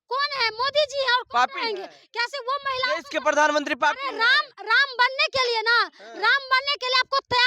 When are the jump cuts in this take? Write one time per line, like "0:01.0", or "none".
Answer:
none